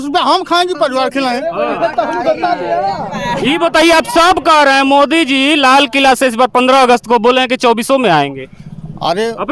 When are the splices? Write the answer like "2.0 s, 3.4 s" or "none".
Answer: none